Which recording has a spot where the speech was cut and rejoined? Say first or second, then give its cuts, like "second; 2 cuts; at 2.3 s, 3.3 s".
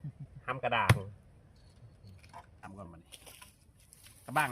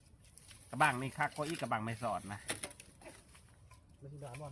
first; 1 cut; at 2.6 s